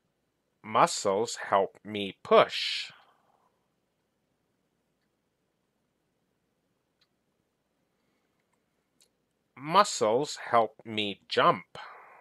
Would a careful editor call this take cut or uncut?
uncut